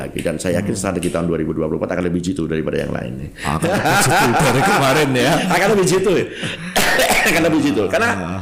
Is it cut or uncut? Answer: uncut